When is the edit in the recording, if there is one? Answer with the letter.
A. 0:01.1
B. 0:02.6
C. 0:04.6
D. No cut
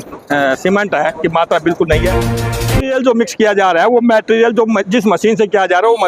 B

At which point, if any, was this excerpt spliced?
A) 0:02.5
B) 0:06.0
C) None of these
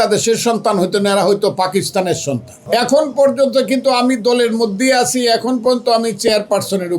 A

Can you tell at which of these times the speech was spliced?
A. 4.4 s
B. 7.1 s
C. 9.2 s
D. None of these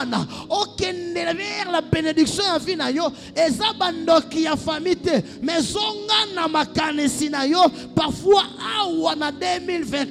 D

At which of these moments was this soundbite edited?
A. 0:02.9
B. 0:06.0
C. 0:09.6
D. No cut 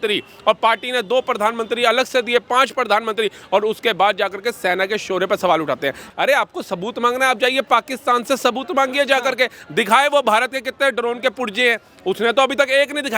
B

